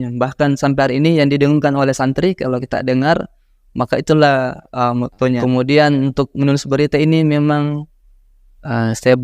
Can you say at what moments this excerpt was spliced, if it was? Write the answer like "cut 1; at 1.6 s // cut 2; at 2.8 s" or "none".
cut 1; at 5.4 s